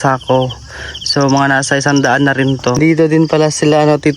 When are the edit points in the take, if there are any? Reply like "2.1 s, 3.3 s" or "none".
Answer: 2.8 s